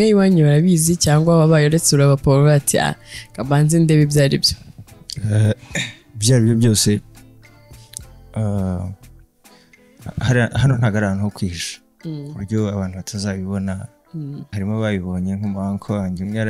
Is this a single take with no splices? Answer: no; 1 cut; at 14.4 s

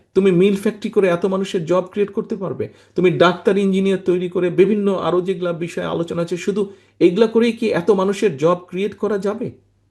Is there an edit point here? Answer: no; 0 cuts

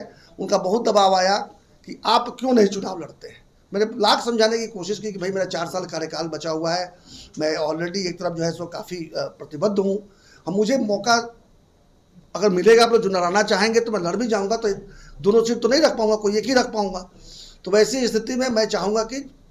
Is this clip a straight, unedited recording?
yes; 0 cuts

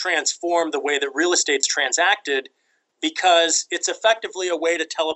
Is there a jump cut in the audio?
no; 0 cuts

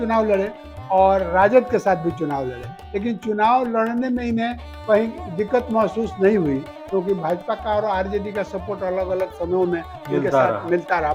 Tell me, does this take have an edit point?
no; 0 cuts

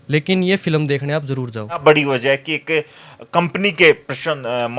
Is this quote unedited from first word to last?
no; 2 cuts; at 1.8 s, 3.9 s

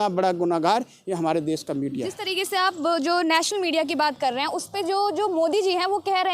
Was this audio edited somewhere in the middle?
no; 0 cuts

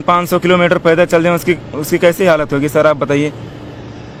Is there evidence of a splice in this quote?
no; 0 cuts

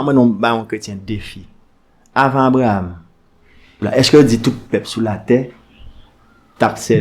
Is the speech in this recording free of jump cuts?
no; 1 cut; at 3.8 s

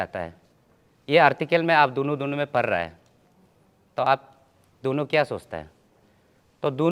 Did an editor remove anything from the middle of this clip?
no; 0 cuts

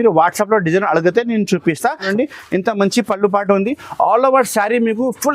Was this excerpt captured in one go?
no; 1 cut; at 2.1 s

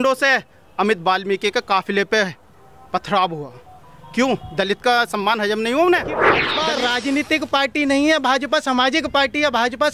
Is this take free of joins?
no; 1 cut; at 6.5 s

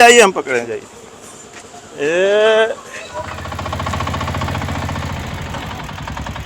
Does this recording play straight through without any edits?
no; 1 cut; at 3.4 s

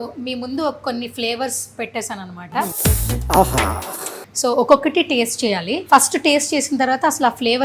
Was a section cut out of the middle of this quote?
yes; 3 cuts; at 2.7 s, 4.2 s, 5.7 s

